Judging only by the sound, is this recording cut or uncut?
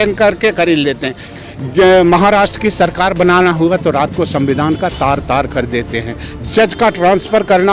cut